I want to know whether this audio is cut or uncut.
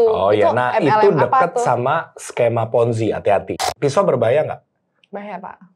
cut